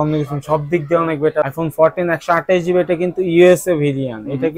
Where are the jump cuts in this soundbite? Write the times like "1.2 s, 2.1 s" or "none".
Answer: 1.4 s